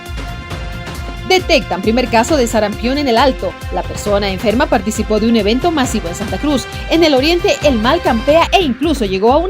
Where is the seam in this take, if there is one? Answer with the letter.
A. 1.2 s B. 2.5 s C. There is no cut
A